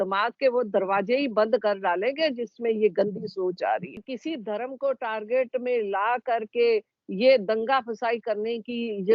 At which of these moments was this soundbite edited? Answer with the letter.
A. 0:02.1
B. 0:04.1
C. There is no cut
B